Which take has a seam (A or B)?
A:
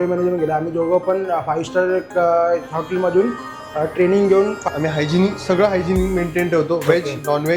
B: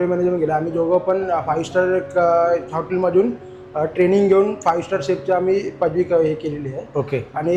A